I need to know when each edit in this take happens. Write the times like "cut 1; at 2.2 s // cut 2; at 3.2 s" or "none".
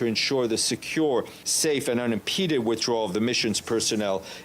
cut 1; at 1.4 s